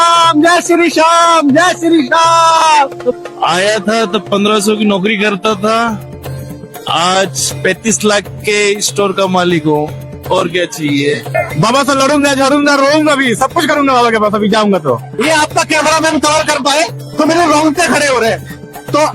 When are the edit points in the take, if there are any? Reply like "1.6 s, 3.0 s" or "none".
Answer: 3.1 s, 11.3 s, 15.1 s